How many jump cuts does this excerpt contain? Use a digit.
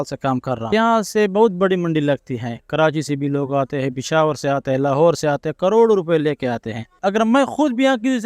2